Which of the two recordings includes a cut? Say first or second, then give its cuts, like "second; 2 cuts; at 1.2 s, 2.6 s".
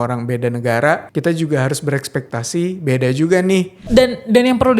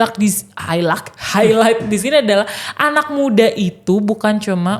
first; 2 cuts; at 1.1 s, 3.8 s